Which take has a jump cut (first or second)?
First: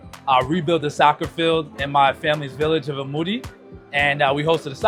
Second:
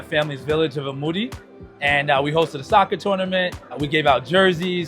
second